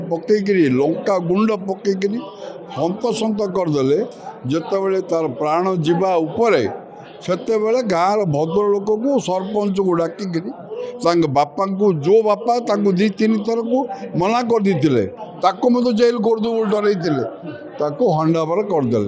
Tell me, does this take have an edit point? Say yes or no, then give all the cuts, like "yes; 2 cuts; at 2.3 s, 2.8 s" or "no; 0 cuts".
no; 0 cuts